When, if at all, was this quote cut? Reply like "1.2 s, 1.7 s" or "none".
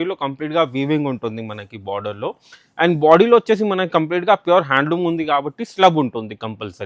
none